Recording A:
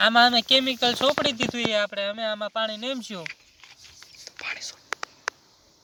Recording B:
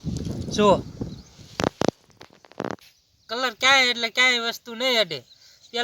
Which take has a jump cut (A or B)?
B